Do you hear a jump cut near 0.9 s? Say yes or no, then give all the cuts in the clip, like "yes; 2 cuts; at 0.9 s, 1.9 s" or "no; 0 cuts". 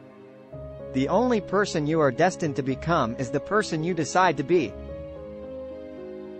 yes; 2 cuts; at 0.9 s, 5.4 s